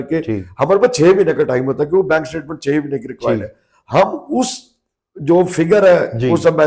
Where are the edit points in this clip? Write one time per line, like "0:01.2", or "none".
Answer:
none